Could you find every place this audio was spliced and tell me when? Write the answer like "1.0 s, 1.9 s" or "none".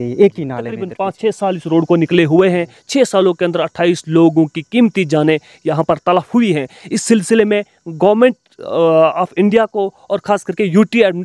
1.0 s